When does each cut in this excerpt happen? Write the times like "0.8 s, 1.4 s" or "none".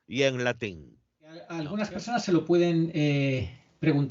1.6 s